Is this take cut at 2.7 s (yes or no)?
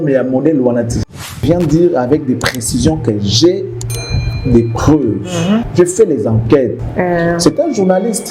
no